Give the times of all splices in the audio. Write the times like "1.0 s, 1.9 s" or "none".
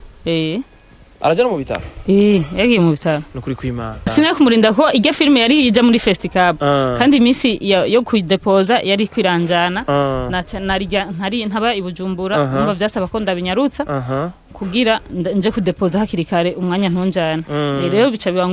4.1 s